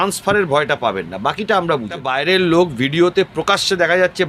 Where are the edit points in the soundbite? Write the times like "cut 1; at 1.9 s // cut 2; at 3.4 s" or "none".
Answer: cut 1; at 2.0 s